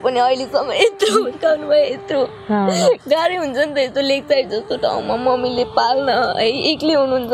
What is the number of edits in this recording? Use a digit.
0